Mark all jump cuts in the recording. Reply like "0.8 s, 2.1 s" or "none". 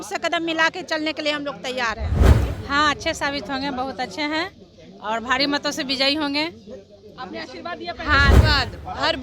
2.4 s, 8.4 s